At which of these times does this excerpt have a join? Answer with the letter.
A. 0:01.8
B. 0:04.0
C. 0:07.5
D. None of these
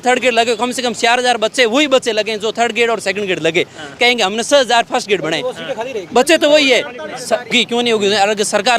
C